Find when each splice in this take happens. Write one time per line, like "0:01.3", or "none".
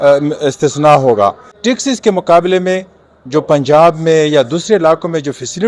0:01.6